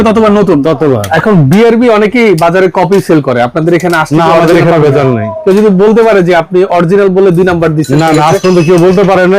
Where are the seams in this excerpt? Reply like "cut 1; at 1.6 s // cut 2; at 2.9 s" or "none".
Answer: cut 1; at 1.1 s